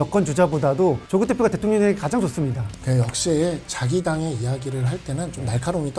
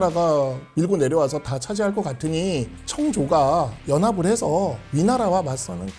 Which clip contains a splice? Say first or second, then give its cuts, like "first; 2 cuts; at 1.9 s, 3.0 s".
first; 1 cut; at 2.6 s